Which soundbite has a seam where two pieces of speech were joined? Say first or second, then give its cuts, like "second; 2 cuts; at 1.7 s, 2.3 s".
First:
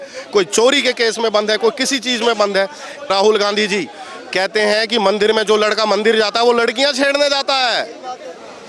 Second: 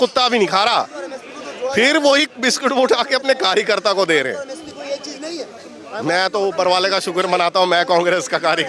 first; 1 cut; at 3.1 s